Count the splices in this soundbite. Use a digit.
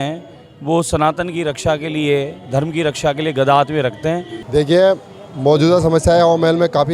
1